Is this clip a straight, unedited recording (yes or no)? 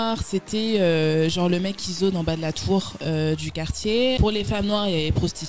no